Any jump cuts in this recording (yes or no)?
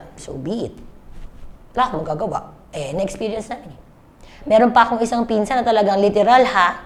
no